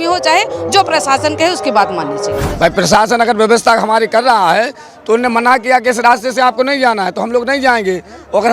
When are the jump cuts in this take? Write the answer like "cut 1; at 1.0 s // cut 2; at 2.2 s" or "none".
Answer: cut 1; at 2.4 s